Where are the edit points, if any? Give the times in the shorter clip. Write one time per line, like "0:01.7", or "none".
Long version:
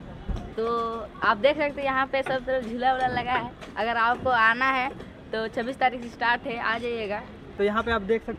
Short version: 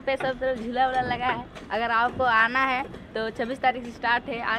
0:03.0